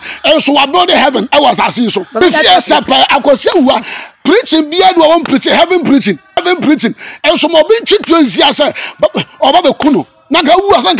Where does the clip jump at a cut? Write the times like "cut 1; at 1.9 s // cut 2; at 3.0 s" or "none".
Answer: cut 1; at 2.2 s // cut 2; at 6.4 s